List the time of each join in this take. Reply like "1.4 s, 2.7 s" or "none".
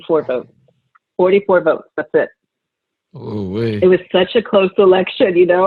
none